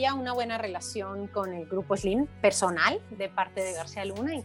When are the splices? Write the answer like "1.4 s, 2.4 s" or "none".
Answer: none